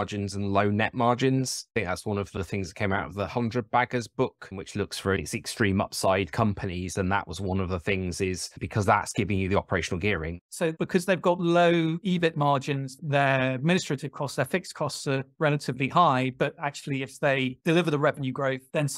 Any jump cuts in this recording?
yes; 1 cut; at 15.3 s

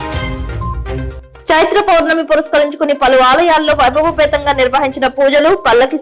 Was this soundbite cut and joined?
no; 0 cuts

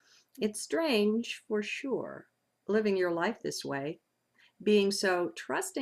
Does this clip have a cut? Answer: yes; 1 cut; at 3.6 s

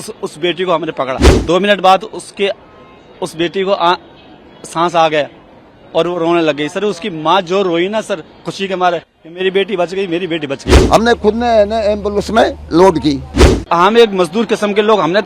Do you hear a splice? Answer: yes; 3 cuts; at 1.3 s, 10.7 s, 13.5 s

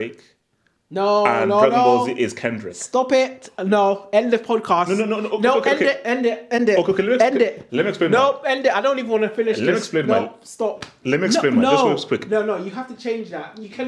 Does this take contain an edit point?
no; 0 cuts

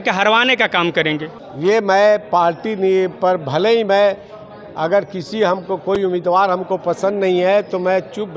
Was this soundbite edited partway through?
no; 0 cuts

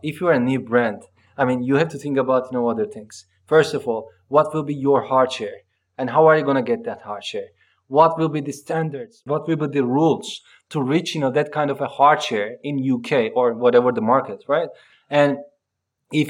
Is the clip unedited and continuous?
yes; 0 cuts

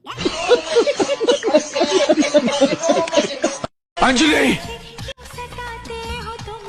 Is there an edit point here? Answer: no; 0 cuts

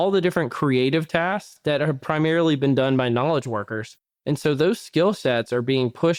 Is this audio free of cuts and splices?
yes; 0 cuts

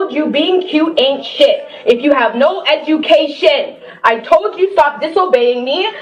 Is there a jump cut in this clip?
no; 0 cuts

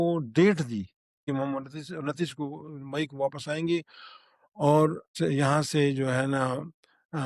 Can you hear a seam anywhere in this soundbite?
yes; 2 cuts; at 1.2 s, 5.0 s

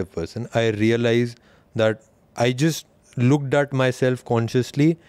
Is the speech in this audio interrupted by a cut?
no; 0 cuts

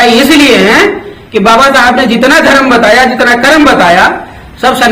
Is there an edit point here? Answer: no; 0 cuts

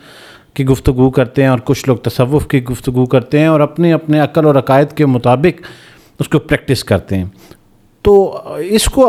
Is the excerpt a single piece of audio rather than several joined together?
yes; 0 cuts

